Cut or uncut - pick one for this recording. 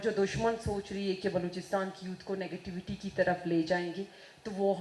uncut